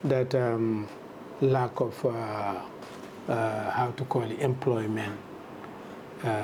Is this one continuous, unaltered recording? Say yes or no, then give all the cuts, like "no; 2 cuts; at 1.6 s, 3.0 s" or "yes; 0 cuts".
yes; 0 cuts